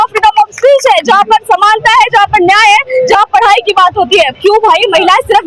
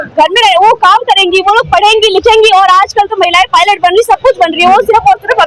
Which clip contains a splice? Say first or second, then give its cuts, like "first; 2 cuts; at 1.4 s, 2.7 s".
first; 1 cut; at 4.3 s